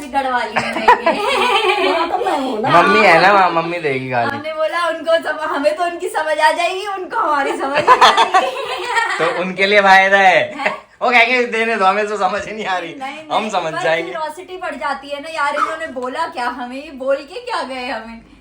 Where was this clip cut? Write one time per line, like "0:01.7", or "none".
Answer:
none